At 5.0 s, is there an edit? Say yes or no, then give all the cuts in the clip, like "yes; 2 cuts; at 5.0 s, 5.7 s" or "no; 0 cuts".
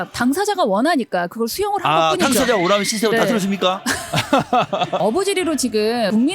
yes; 1 cut; at 5.0 s